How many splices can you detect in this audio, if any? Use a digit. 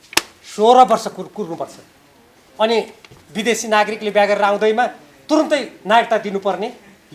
0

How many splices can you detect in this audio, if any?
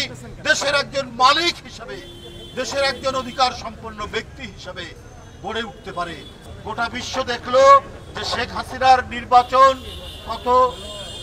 1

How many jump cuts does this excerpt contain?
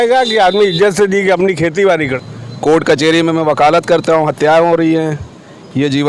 1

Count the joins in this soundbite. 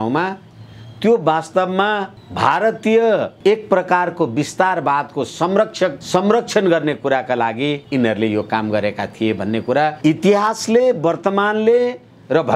5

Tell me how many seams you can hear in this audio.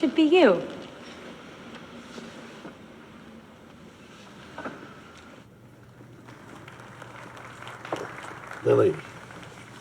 1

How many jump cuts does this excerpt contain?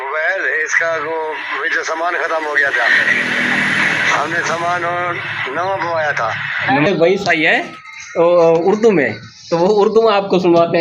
1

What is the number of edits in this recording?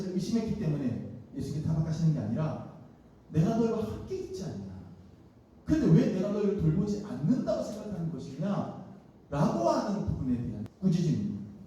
1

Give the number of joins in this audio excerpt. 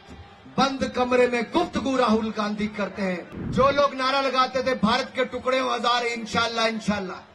1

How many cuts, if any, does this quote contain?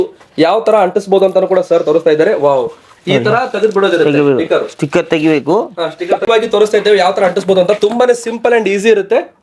1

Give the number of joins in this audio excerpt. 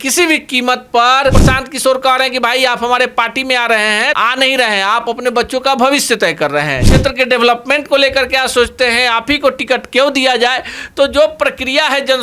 3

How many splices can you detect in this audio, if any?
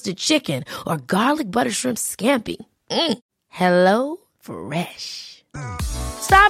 0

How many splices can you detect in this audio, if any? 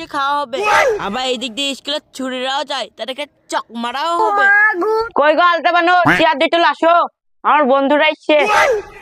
1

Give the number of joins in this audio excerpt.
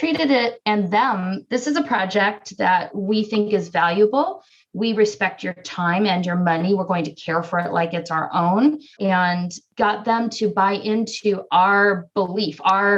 2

